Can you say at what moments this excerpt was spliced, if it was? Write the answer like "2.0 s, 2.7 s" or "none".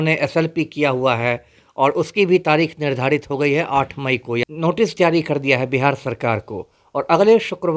4.5 s